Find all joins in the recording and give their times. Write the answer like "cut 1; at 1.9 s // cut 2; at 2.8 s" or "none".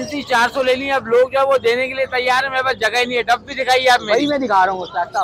none